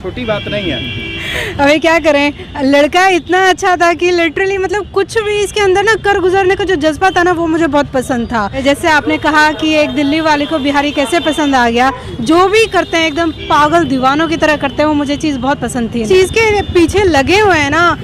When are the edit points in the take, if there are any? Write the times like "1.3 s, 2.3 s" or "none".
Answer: 8.6 s, 12.1 s, 16.0 s